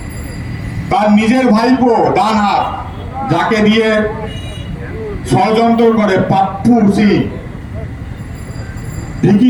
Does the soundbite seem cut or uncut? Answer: uncut